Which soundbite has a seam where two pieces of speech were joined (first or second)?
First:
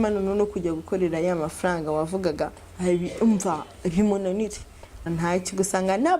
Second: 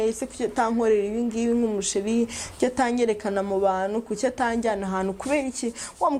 first